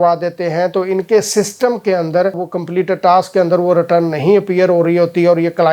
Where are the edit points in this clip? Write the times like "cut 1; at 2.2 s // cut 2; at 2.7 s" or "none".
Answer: none